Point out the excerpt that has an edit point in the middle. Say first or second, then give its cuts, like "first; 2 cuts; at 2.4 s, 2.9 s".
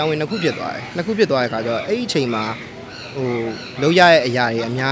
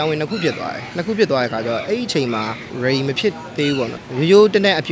second; 2 cuts; at 2.7 s, 4.0 s